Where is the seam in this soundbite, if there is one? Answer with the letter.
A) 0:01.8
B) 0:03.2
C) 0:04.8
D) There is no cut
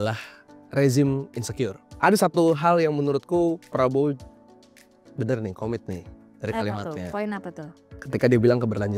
A